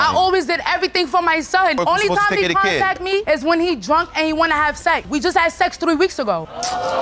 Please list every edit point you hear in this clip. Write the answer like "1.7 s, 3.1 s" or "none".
1.8 s, 5.1 s

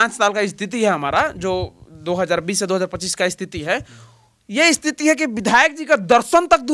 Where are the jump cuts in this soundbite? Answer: none

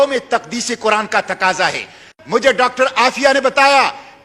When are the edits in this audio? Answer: 2.1 s

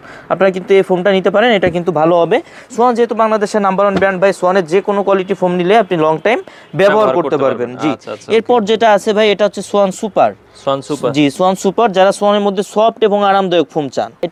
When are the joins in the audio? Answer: none

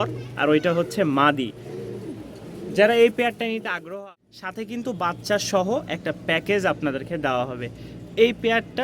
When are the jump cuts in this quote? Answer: 3.9 s

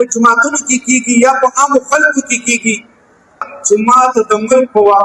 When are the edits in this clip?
3.5 s

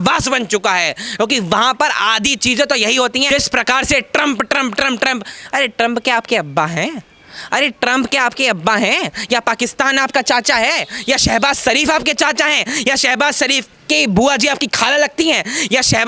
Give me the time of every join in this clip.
3.3 s

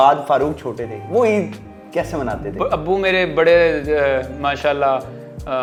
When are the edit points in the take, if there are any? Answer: none

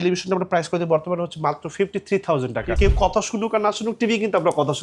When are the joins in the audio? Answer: 2.7 s

